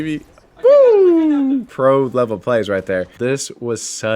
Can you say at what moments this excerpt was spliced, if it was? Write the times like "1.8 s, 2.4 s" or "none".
1.7 s, 3.1 s